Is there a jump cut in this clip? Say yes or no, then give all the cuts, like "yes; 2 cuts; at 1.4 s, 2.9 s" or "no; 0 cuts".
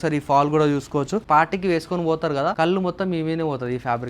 yes; 2 cuts; at 1.2 s, 2.5 s